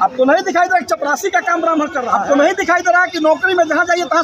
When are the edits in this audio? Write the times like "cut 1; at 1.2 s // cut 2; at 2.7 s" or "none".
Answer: cut 1; at 2.1 s